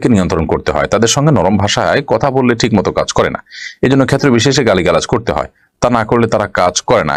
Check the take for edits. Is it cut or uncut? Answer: uncut